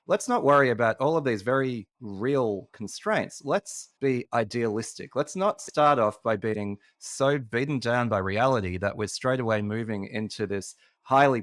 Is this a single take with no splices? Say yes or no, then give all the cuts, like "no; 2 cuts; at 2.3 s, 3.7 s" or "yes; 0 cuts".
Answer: yes; 0 cuts